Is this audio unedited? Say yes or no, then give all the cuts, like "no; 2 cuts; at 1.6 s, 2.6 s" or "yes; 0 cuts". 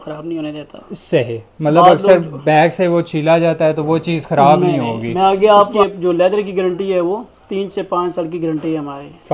no; 1 cut; at 5.7 s